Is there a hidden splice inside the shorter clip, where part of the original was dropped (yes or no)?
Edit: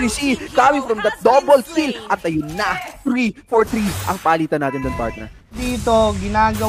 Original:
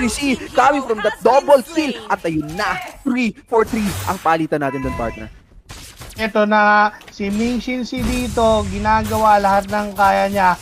yes